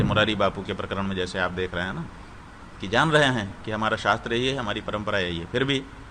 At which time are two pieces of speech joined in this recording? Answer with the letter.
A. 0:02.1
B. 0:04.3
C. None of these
C